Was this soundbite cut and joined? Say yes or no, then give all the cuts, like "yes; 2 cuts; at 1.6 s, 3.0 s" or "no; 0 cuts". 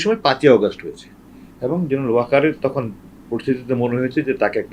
no; 0 cuts